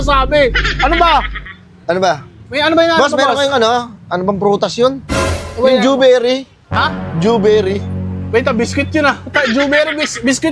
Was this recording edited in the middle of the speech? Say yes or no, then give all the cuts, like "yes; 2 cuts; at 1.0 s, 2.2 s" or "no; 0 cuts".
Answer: no; 0 cuts